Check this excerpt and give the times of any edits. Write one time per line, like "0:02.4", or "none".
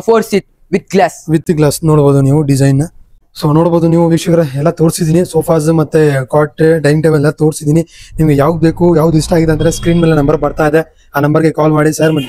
none